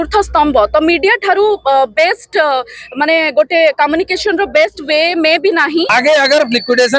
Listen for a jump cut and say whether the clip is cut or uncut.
cut